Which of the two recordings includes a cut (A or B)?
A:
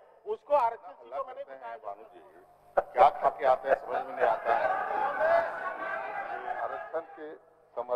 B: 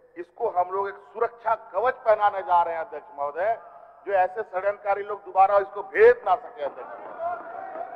A